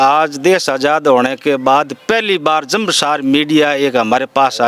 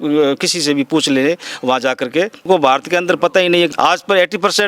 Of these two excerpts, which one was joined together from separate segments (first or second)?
second